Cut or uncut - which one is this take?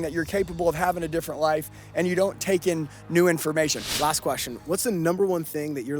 cut